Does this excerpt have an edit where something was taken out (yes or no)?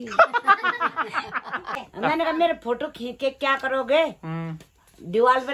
yes